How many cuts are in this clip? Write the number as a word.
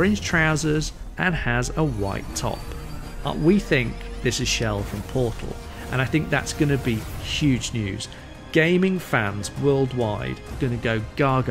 one